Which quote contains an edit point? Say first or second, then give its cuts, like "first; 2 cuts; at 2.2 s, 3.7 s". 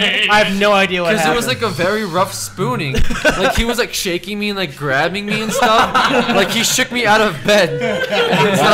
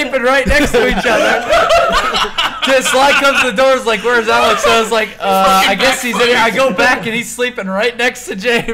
second; 1 cut; at 1.0 s